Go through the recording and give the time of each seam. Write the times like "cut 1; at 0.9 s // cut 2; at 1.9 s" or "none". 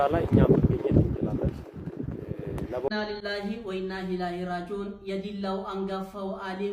cut 1; at 2.9 s